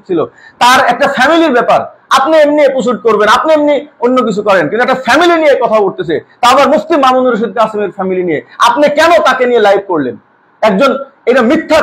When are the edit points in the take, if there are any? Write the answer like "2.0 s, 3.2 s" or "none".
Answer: none